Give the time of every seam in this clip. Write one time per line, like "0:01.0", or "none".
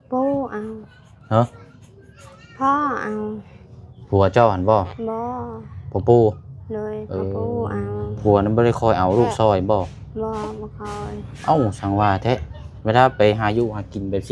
0:08.1